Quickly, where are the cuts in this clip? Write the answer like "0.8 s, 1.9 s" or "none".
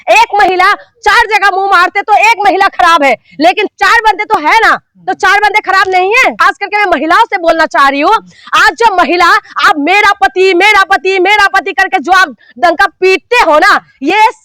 6.4 s